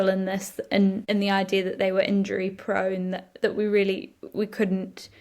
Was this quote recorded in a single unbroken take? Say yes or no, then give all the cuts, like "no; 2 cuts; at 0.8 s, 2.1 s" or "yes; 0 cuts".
no; 1 cut; at 1.0 s